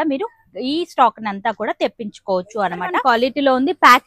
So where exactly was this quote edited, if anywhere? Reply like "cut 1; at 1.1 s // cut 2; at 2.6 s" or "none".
cut 1; at 3.0 s